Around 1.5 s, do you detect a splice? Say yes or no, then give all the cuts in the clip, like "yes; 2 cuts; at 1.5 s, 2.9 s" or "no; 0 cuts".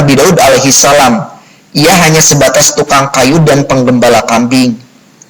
no; 0 cuts